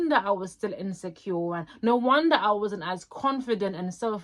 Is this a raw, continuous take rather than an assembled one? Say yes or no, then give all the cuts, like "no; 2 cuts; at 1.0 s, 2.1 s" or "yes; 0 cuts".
yes; 0 cuts